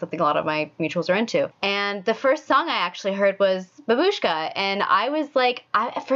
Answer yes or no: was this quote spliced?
yes